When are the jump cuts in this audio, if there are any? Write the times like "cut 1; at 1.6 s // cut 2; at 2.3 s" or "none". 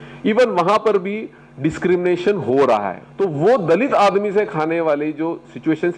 cut 1; at 3.0 s